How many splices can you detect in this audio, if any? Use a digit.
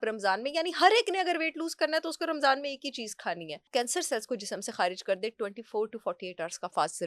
1